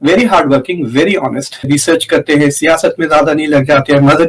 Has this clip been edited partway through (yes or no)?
yes